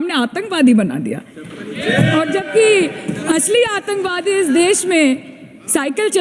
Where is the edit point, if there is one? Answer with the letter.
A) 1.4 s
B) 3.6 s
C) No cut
C